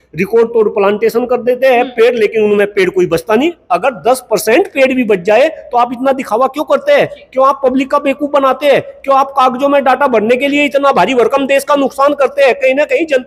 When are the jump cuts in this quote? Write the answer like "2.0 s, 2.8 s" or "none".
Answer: none